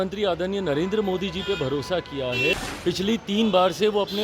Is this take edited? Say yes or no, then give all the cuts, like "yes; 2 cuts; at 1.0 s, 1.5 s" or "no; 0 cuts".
yes; 1 cut; at 2.6 s